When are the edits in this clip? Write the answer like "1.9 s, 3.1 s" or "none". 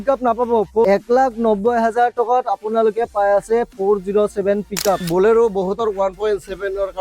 0.8 s, 5.0 s